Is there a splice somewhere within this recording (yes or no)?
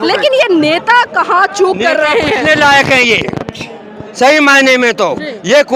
no